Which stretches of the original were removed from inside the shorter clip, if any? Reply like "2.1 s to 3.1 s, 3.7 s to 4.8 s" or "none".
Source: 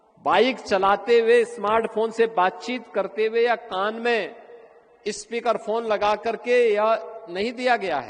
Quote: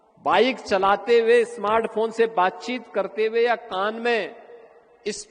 none